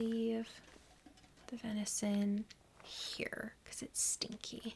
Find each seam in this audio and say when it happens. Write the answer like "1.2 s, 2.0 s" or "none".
none